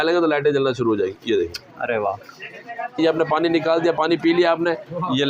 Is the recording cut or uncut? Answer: cut